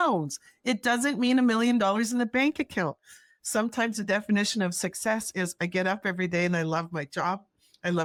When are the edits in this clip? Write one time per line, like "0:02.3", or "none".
none